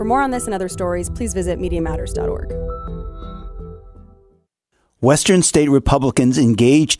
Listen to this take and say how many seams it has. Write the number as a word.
one